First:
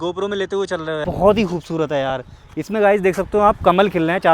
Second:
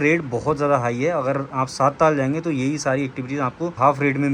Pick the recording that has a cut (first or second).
first